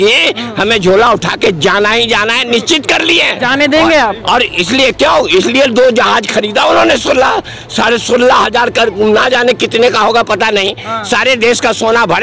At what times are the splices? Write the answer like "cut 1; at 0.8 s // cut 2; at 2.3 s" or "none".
none